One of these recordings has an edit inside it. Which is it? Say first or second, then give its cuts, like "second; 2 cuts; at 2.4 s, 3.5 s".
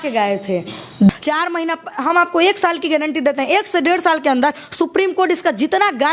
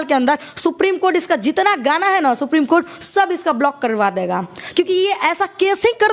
first; 1 cut; at 1.1 s